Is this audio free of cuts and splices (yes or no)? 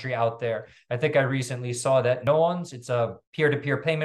no